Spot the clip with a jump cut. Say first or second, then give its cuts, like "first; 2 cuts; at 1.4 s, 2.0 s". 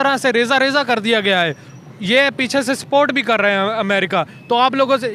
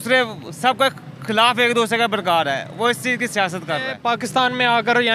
second; 1 cut; at 4.0 s